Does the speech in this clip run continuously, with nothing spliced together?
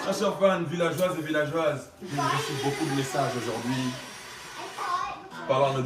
no; 1 cut; at 2.0 s

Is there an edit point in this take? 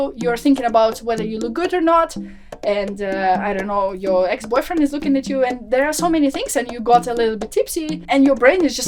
yes; 1 cut; at 8.0 s

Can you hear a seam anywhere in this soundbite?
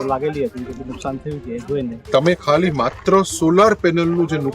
yes; 1 cut; at 2.0 s

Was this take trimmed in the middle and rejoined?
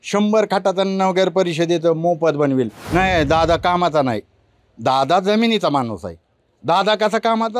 yes; 1 cut; at 2.8 s

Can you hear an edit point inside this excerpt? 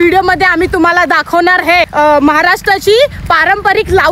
yes; 1 cut; at 1.9 s

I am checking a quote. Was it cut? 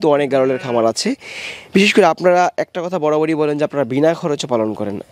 no; 0 cuts

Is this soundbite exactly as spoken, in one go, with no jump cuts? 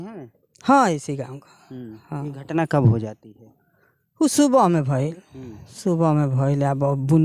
yes; 0 cuts

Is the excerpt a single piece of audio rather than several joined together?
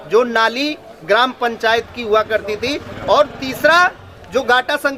yes; 0 cuts

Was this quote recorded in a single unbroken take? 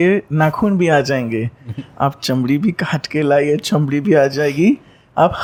yes; 0 cuts

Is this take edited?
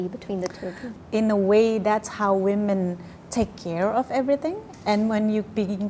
yes; 1 cut; at 0.9 s

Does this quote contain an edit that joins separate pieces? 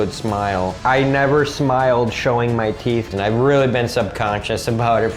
yes; 1 cut; at 3.1 s

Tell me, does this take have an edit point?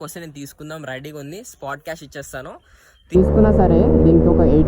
yes; 1 cut; at 3.1 s

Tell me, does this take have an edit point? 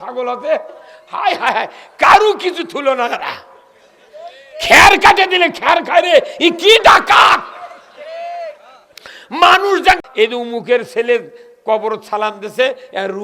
yes; 1 cut; at 10.1 s

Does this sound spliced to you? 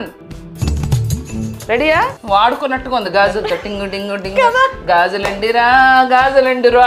yes; 1 cut; at 2.2 s

